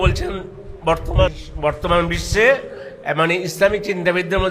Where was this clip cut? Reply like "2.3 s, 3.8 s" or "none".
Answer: 1.4 s